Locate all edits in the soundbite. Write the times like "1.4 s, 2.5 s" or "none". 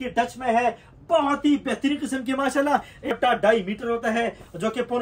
3.1 s